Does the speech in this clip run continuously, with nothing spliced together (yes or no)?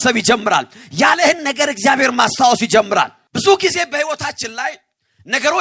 no